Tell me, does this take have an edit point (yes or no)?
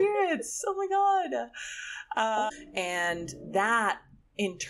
yes